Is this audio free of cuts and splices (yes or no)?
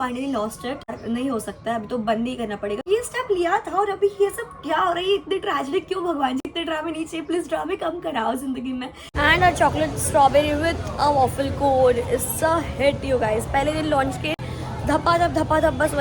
no